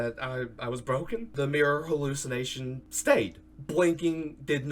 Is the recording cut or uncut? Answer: cut